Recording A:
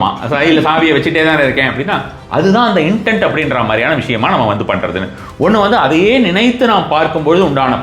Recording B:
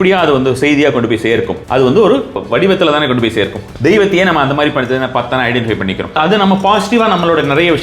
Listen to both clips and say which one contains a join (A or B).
B